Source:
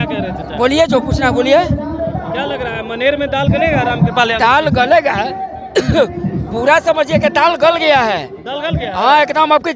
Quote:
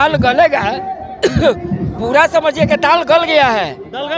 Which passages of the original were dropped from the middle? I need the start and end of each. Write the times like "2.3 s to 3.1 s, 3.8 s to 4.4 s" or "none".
none